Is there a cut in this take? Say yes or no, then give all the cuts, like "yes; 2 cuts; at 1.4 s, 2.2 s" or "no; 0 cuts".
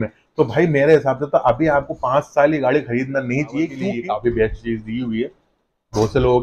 yes; 1 cut; at 3.8 s